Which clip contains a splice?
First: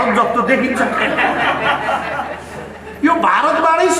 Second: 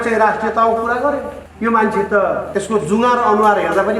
second; 2 cuts; at 1.4 s, 2.4 s

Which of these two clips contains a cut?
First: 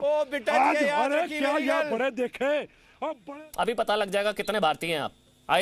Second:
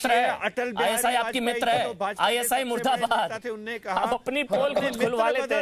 first; 1 cut; at 3.2 s

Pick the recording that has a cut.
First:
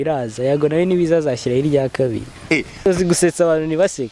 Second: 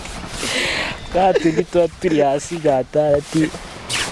first; 1 cut; at 2.9 s

